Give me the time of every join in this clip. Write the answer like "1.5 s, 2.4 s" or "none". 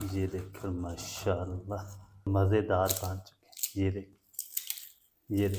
2.3 s